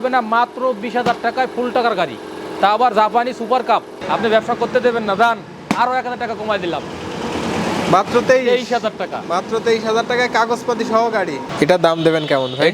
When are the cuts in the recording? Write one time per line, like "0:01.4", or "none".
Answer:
0:04.0
0:11.5